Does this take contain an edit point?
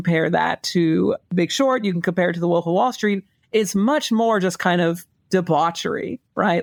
no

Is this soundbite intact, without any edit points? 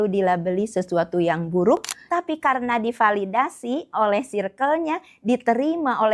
no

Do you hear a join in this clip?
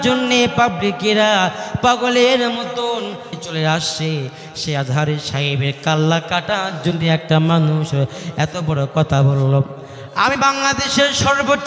yes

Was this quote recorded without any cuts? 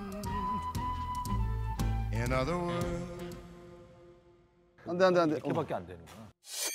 yes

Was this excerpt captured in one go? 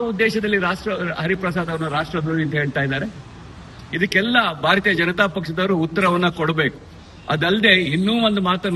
yes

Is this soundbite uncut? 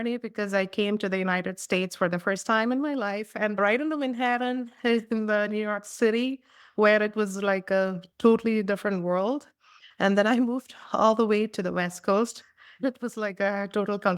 no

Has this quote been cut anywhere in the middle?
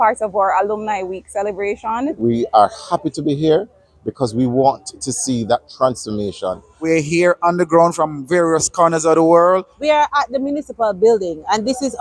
yes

